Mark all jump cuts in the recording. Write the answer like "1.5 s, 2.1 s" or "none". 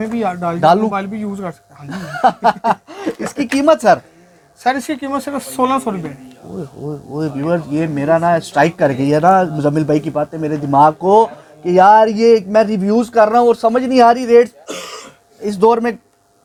none